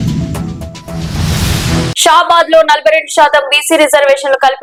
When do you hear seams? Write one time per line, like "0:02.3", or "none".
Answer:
none

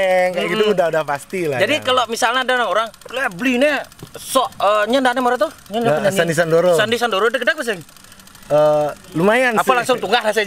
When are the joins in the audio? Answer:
none

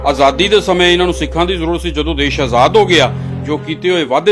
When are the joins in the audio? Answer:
none

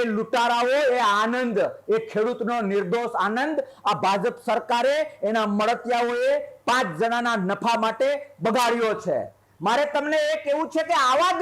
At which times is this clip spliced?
none

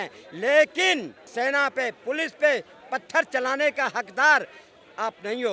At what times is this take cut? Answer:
0:01.2

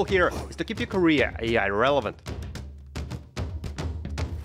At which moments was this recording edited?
0:02.2

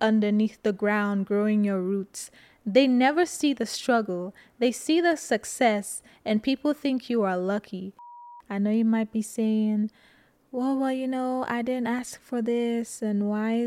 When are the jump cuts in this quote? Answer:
0:08.2

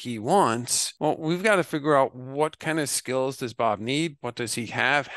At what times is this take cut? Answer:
none

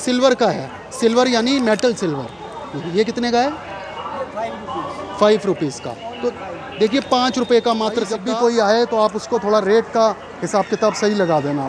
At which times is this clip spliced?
0:08.2

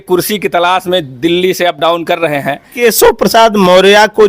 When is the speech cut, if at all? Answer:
0:02.7

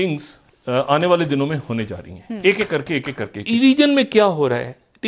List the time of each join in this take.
0:03.4

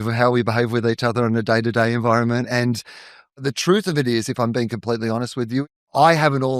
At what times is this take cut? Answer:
0:03.4
0:05.6

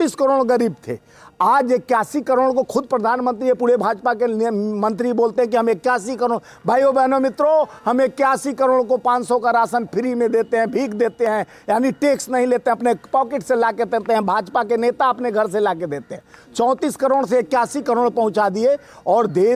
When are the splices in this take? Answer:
none

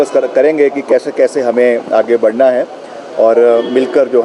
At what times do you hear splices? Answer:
none

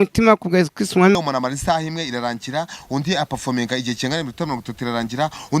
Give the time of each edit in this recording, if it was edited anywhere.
0:01.1

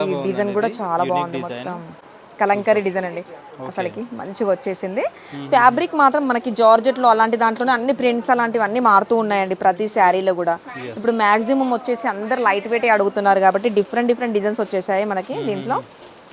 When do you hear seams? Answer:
none

